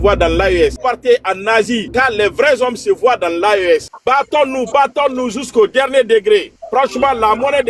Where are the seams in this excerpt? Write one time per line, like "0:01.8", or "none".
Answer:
0:00.8
0:01.9
0:03.9